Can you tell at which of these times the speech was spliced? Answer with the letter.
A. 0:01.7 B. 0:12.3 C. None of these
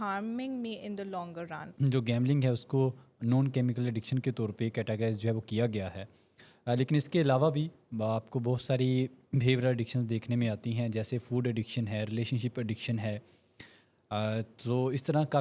A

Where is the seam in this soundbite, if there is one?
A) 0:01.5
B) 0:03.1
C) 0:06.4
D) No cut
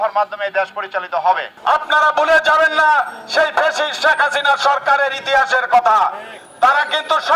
A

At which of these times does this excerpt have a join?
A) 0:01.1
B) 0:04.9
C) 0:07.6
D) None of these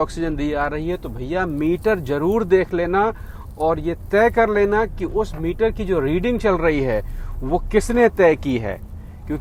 D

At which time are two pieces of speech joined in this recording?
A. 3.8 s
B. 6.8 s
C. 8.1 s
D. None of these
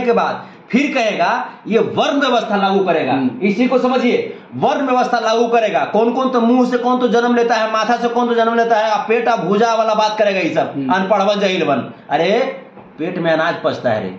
D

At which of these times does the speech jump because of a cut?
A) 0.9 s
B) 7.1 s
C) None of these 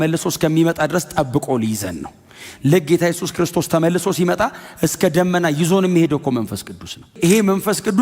B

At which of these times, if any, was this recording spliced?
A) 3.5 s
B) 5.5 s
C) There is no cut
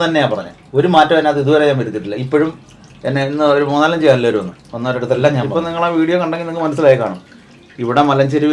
B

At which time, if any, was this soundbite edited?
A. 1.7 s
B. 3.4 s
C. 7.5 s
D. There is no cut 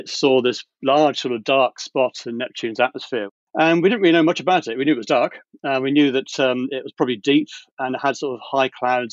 B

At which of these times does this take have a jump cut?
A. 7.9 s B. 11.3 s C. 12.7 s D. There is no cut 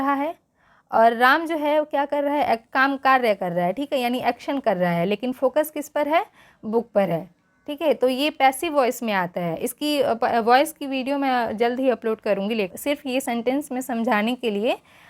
C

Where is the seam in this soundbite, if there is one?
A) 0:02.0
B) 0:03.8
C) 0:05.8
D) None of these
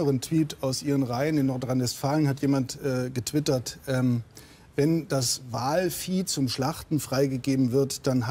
D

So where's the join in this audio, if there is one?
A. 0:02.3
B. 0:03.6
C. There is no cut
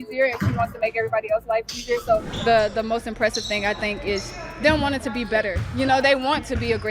A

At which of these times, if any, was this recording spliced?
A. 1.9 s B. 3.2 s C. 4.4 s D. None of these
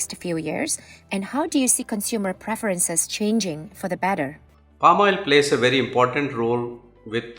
D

